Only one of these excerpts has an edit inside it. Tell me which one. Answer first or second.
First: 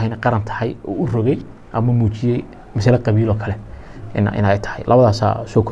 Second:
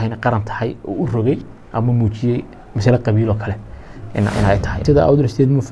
second